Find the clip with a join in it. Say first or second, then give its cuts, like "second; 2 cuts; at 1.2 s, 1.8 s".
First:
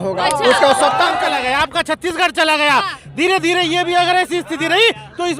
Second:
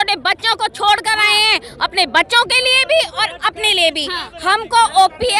first; 1 cut; at 1.3 s